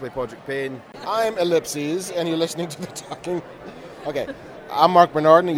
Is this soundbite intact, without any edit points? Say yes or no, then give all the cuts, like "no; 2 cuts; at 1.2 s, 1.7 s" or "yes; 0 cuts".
no; 1 cut; at 0.9 s